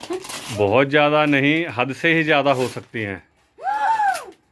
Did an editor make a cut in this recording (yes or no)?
no